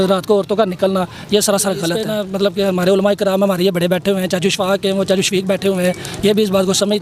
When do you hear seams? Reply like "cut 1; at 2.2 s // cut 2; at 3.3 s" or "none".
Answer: none